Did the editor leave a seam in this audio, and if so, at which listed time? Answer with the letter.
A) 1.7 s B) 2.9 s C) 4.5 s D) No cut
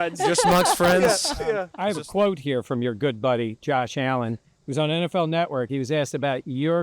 A